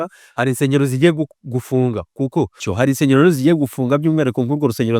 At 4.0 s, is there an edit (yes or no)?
no